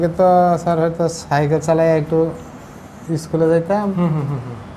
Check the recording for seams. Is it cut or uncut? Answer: uncut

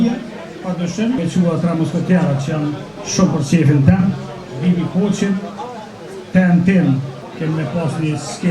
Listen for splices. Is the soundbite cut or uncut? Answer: cut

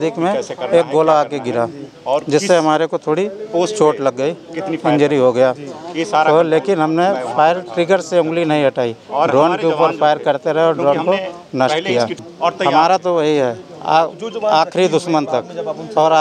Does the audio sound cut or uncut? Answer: cut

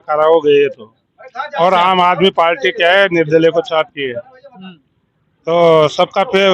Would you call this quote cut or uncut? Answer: uncut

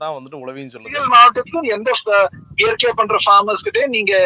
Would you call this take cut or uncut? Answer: cut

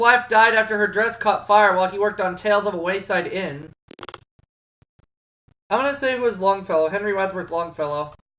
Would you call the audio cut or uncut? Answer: uncut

